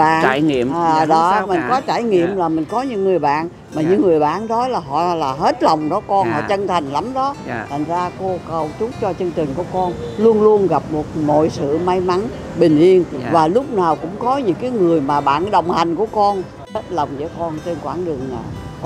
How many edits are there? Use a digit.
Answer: 1